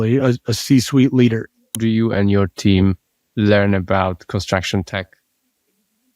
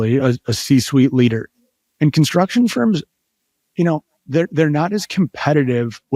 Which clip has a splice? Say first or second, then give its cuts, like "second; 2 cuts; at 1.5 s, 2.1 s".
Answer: first; 1 cut; at 1.8 s